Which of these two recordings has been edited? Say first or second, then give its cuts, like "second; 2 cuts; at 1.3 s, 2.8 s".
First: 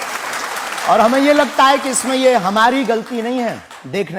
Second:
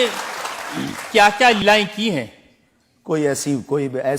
second; 1 cut; at 1.6 s